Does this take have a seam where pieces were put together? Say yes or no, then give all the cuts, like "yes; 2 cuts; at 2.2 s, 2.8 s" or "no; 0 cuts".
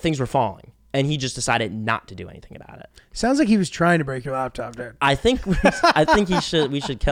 no; 0 cuts